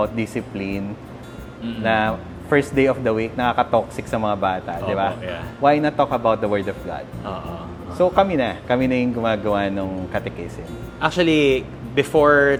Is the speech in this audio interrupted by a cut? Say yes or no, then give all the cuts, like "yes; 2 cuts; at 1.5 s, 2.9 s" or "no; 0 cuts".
no; 0 cuts